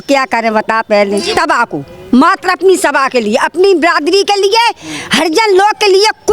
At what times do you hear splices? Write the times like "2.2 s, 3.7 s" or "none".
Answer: 1.3 s